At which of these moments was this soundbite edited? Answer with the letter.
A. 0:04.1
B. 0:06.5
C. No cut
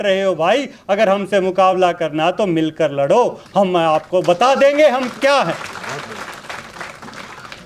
C